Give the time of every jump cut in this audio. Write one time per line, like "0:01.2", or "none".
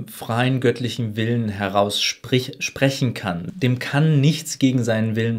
0:03.5